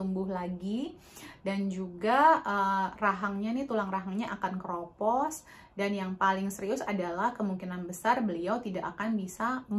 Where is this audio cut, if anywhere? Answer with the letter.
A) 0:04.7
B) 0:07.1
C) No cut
C